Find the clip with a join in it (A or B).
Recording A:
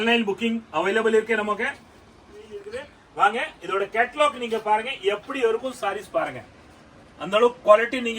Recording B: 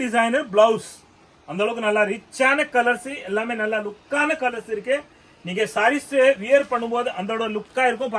A